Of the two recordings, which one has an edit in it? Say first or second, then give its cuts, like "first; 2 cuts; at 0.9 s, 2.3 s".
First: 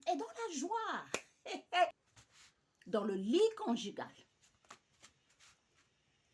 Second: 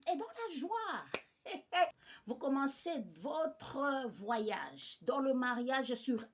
first; 1 cut; at 2.1 s